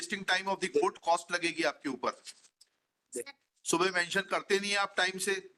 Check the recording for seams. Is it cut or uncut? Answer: uncut